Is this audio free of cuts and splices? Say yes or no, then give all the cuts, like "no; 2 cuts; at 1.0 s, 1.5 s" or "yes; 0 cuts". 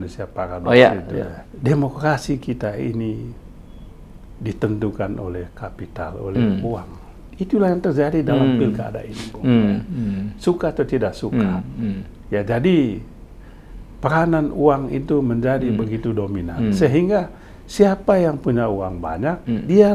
no; 1 cut; at 1.4 s